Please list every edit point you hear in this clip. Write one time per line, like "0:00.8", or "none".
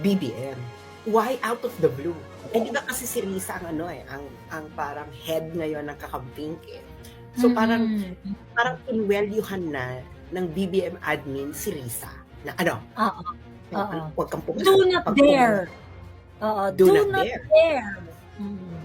none